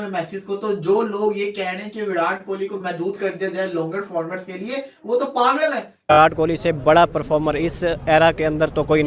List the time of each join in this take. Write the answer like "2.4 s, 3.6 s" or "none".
6.1 s